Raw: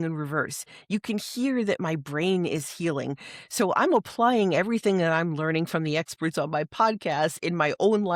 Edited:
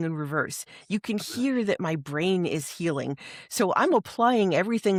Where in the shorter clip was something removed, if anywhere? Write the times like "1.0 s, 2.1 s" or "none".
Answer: none